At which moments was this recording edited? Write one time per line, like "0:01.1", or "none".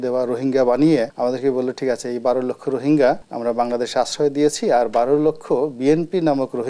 0:01.1
0:03.3